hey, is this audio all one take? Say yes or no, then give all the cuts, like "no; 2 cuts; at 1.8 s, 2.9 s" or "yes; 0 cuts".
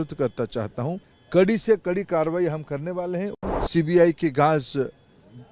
no; 2 cuts; at 1.1 s, 3.4 s